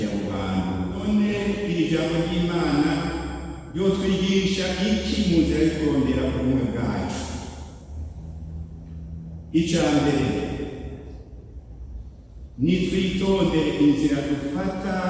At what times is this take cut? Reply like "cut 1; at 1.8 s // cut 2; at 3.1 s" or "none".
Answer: cut 1; at 1.0 s

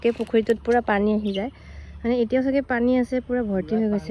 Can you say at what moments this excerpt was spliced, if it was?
none

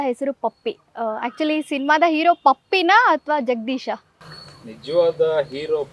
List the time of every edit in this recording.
none

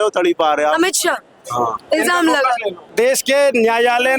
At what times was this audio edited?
cut 1; at 2.8 s

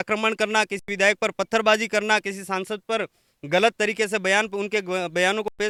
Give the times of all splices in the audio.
none

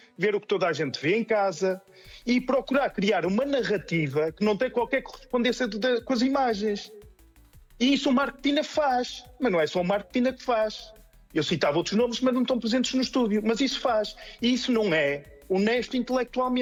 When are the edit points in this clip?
none

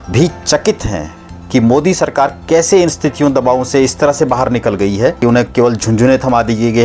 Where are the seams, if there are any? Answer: cut 1; at 5.2 s

